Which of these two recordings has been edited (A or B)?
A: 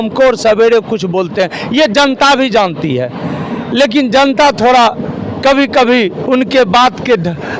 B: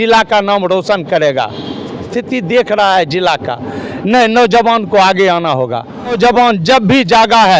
B